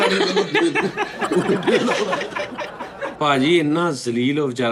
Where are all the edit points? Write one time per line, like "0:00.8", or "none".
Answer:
0:03.0